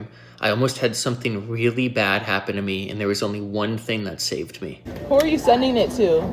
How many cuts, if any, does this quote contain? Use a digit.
1